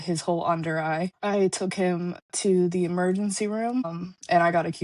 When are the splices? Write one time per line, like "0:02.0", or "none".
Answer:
0:03.9